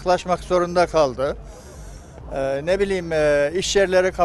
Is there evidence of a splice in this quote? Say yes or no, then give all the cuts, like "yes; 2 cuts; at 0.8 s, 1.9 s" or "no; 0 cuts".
no; 0 cuts